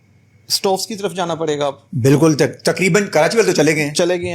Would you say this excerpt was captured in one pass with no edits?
yes; 0 cuts

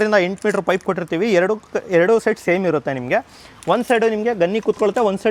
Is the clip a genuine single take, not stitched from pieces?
yes; 0 cuts

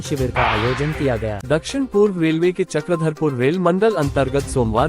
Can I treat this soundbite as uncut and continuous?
no; 1 cut; at 1.4 s

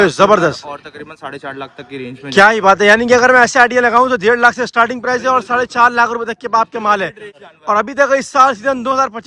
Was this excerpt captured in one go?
yes; 0 cuts

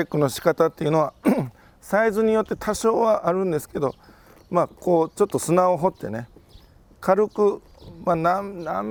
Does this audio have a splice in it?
no; 0 cuts

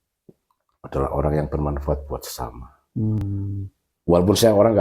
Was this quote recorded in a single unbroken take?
yes; 0 cuts

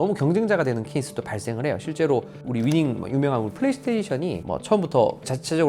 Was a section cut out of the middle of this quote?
yes; 1 cut; at 2.5 s

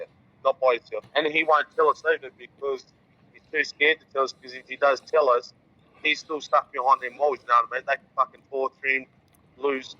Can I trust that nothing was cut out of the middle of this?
no; 1 cut; at 1.0 s

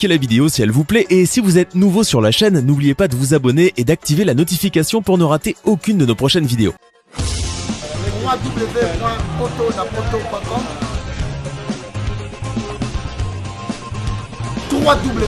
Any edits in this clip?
no; 0 cuts

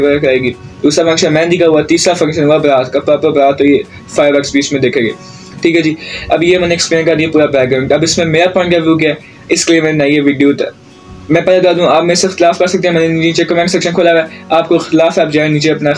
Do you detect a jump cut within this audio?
no; 0 cuts

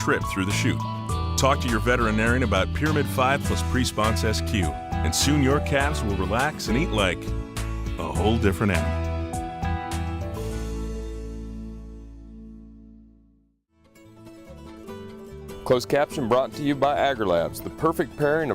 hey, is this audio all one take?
no; 2 cuts; at 13.9 s, 15.2 s

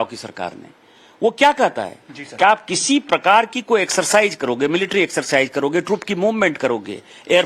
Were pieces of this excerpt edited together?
yes; 1 cut; at 6.6 s

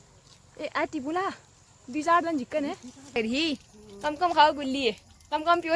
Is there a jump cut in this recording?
yes; 1 cut; at 3.2 s

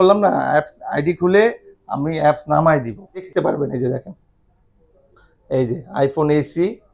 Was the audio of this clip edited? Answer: yes; 1 cut; at 3.3 s

